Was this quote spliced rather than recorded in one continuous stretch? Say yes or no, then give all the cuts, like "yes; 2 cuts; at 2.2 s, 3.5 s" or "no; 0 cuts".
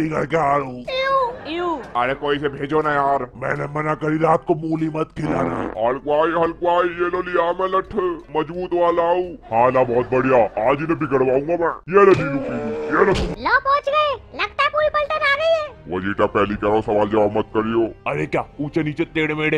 yes; 2 cuts; at 5.7 s, 13.3 s